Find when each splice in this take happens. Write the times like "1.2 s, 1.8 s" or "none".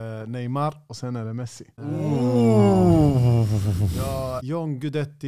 1.6 s, 4.4 s